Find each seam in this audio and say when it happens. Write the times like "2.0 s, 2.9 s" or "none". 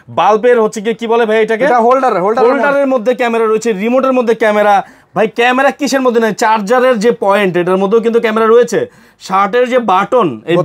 none

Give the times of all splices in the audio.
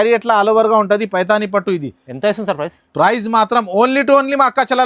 none

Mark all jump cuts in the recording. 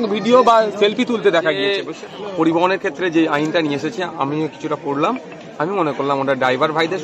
1.9 s

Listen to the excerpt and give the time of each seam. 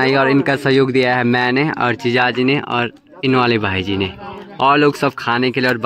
none

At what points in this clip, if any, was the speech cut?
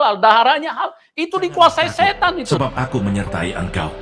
2.5 s

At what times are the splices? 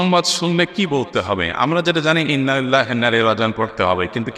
none

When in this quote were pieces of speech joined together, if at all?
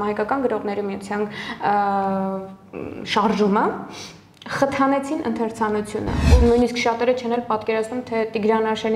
6.2 s

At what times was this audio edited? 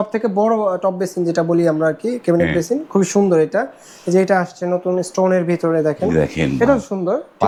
none

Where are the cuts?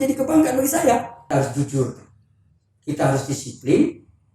1.2 s

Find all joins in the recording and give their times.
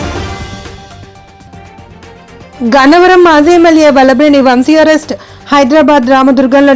1.6 s

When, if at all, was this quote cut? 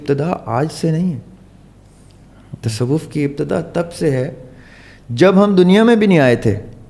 none

